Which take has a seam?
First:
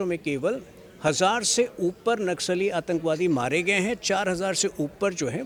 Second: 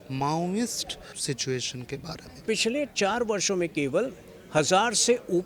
second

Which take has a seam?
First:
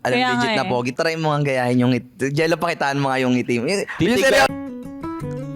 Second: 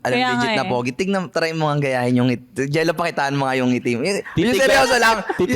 first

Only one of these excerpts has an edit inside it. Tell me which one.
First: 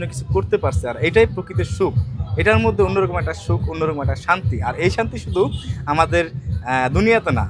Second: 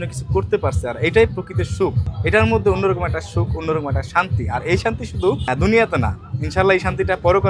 second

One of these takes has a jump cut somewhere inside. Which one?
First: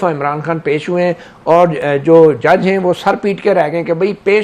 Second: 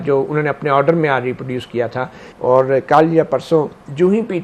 second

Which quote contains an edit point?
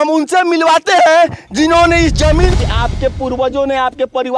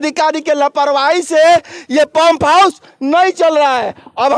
first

